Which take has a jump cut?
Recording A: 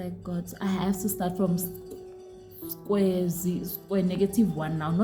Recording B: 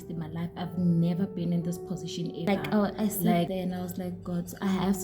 B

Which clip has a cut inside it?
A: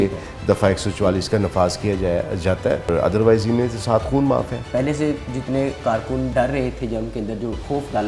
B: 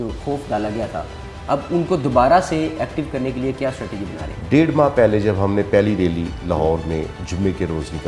A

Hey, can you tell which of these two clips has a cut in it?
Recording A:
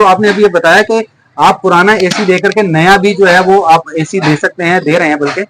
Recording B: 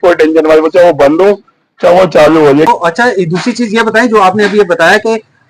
B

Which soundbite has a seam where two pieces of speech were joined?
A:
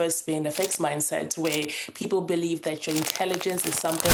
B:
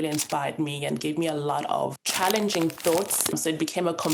B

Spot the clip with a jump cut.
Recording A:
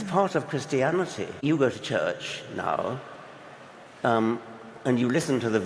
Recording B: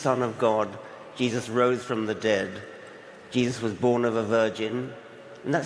A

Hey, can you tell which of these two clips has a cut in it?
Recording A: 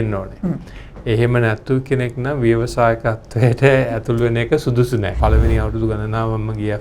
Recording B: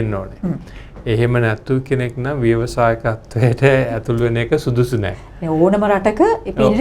A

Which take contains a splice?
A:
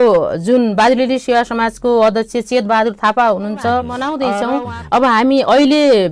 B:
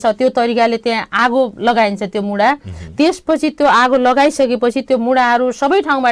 A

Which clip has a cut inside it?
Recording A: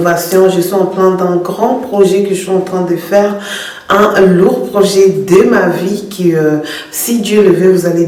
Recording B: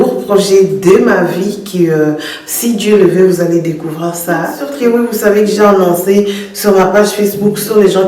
B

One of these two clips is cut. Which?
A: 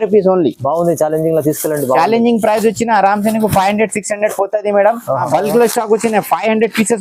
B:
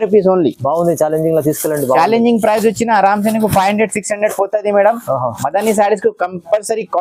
A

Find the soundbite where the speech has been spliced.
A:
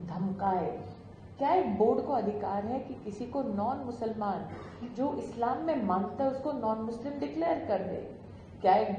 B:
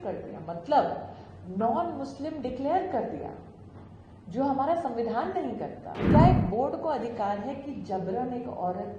B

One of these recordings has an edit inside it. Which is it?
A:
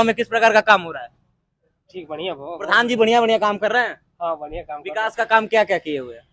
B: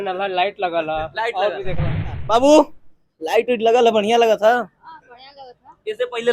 B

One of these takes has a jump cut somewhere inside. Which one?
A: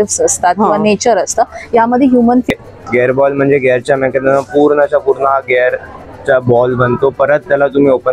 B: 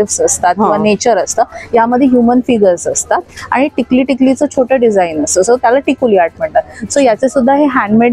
A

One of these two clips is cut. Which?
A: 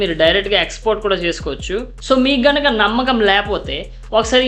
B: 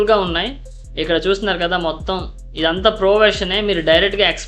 A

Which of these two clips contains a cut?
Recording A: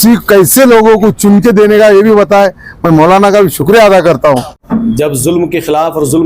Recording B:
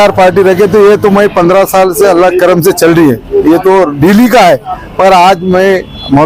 A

